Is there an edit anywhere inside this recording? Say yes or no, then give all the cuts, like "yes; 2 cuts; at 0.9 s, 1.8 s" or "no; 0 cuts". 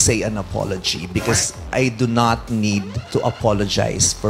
yes; 2 cuts; at 1.5 s, 3.0 s